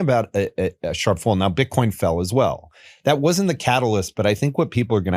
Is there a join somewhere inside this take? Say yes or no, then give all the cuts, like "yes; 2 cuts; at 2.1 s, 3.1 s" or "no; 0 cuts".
no; 0 cuts